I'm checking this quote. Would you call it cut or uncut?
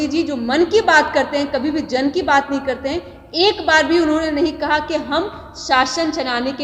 uncut